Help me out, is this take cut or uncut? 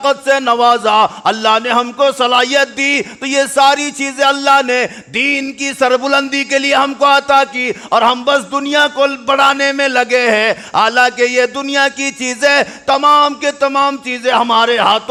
uncut